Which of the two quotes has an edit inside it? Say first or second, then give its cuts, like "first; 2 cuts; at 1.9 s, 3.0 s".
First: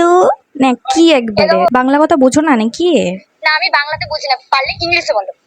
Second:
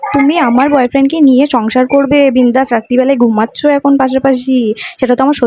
first; 1 cut; at 1.7 s